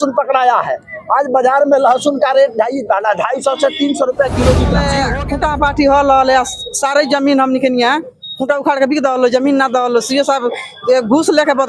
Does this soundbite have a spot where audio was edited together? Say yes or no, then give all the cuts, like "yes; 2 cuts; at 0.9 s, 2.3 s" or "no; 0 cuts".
yes; 1 cut; at 4.9 s